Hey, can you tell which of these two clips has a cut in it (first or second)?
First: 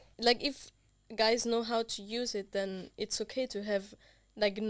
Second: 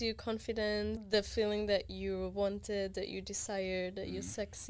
second